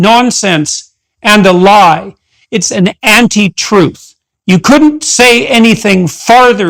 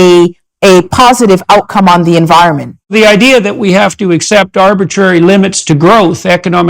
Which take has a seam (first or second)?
second